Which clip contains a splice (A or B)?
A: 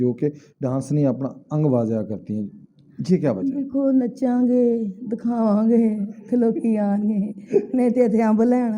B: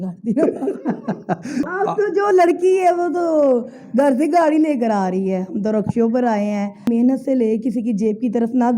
B